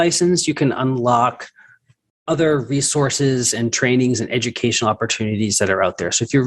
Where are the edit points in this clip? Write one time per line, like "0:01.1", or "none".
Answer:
none